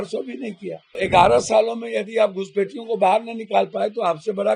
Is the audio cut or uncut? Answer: cut